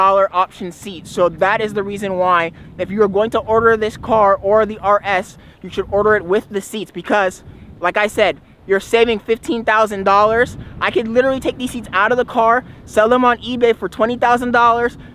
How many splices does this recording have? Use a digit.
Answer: 0